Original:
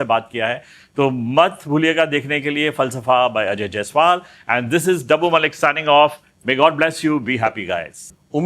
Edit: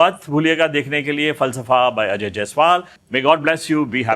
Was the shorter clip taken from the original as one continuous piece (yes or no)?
no